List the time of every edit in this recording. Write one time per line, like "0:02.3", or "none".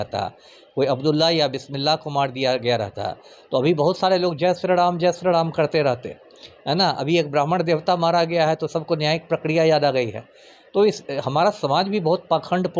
none